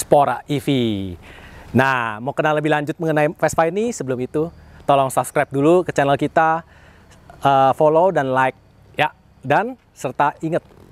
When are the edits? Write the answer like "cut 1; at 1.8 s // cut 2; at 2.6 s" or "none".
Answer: none